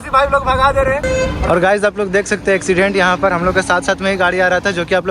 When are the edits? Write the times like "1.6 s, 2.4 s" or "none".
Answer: 1.1 s